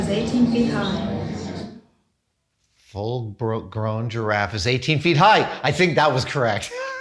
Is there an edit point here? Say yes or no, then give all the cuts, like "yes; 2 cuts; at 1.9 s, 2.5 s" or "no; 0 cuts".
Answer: no; 0 cuts